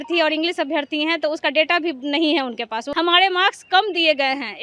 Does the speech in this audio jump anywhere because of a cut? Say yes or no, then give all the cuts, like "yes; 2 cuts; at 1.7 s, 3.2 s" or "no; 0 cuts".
yes; 1 cut; at 2.8 s